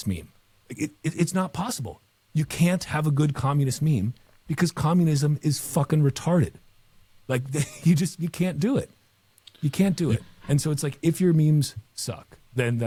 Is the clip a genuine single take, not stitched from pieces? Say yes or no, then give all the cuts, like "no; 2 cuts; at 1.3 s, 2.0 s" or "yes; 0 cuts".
yes; 0 cuts